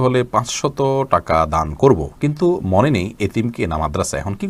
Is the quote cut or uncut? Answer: uncut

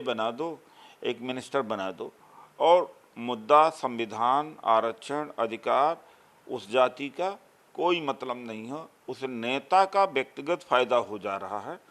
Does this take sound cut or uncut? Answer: uncut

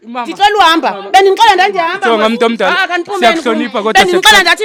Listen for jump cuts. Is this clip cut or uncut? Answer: uncut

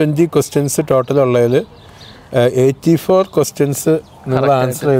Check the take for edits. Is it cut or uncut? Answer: uncut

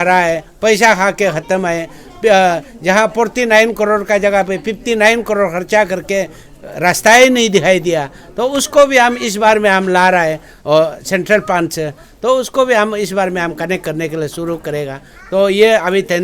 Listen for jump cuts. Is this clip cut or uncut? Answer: uncut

